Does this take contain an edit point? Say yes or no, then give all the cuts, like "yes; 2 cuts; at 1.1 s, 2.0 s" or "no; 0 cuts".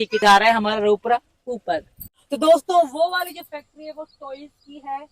no; 0 cuts